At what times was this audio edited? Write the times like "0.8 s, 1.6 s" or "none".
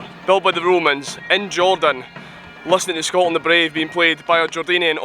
none